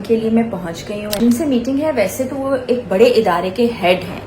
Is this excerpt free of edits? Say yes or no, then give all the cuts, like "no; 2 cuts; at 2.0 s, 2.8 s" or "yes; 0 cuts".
no; 1 cut; at 1.2 s